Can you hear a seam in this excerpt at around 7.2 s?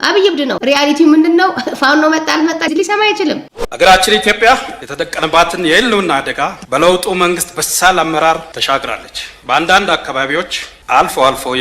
no; 1 cut; at 3.5 s

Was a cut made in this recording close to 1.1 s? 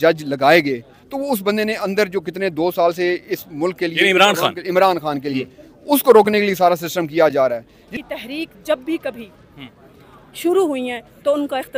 no; 1 cut; at 8.0 s

